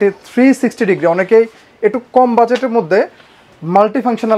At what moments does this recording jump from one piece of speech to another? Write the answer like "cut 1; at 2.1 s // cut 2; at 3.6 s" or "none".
none